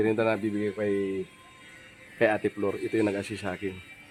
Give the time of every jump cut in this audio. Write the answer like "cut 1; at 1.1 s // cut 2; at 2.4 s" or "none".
none